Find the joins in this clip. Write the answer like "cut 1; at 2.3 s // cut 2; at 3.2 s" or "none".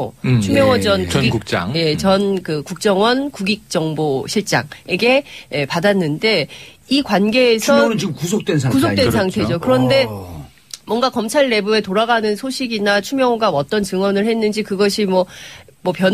cut 1; at 5.0 s